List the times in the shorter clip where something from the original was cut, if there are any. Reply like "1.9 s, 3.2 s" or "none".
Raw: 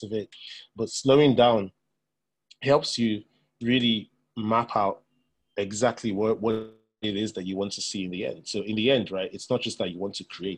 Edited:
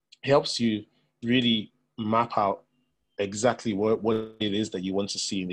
4.3 s